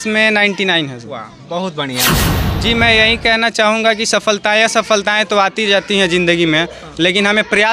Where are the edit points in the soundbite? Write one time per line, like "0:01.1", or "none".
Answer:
0:02.2